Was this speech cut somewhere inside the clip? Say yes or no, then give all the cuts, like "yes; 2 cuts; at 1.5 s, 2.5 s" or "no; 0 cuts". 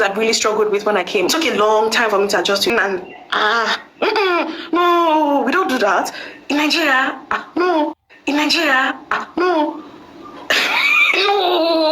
yes; 1 cut; at 2.7 s